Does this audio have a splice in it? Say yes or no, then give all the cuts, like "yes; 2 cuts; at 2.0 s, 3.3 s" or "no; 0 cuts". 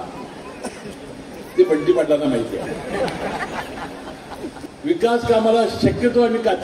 yes; 1 cut; at 4.5 s